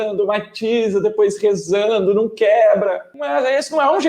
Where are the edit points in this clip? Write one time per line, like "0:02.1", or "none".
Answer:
0:03.1